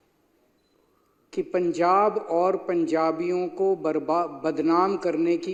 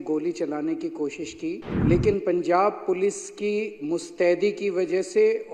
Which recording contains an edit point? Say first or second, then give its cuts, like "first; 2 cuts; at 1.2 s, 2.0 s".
second; 1 cut; at 1.7 s